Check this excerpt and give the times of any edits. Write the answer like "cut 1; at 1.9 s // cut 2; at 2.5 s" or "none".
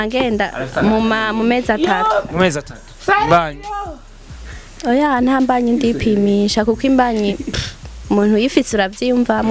none